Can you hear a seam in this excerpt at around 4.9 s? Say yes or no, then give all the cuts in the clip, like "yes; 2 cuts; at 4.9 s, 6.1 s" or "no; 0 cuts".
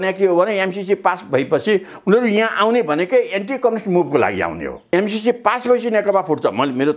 yes; 1 cut; at 4.9 s